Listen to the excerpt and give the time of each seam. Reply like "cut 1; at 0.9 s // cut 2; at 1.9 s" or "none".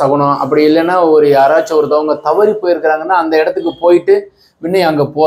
none